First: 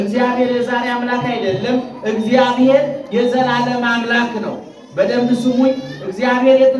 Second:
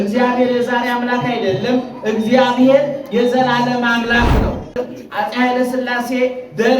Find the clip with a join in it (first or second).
second